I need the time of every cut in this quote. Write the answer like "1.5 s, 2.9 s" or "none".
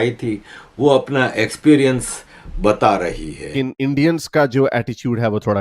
3.3 s